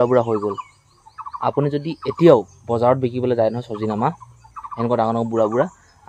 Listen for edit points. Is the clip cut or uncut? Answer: uncut